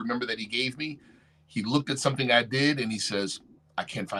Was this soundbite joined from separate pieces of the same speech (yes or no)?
no